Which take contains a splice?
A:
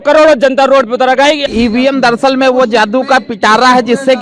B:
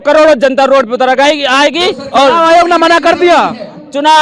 A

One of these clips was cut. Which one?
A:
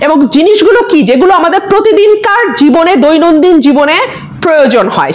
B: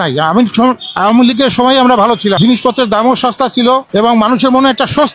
B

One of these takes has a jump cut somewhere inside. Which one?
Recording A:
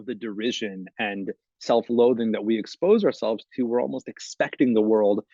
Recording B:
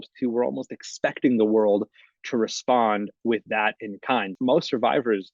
B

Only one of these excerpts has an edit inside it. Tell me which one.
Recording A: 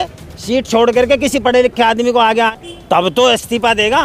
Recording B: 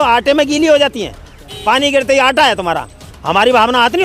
A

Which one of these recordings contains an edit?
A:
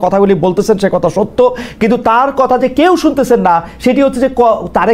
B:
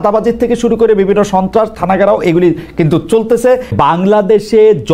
B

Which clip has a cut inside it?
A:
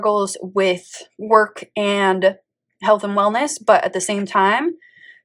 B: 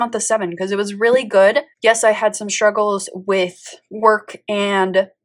B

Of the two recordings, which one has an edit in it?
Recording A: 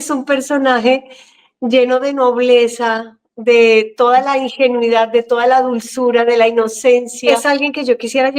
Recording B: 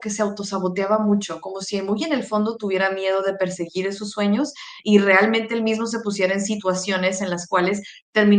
A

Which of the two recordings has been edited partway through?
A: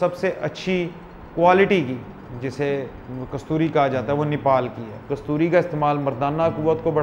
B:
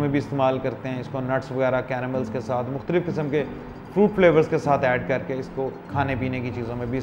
A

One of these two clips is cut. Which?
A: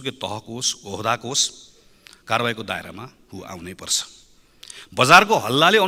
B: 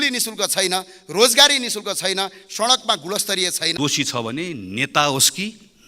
B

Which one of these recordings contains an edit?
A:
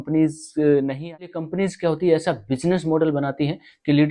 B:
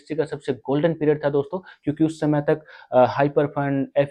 A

